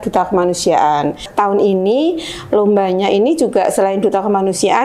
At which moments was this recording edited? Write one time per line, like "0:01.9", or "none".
0:01.3